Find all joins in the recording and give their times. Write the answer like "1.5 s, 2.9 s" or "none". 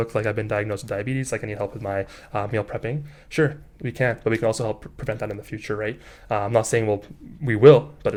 none